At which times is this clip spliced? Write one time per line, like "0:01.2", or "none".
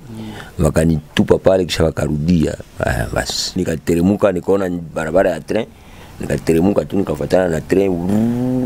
0:01.1
0:03.6